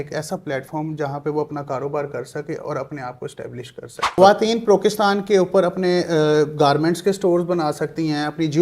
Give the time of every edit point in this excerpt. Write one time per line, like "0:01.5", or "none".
0:04.2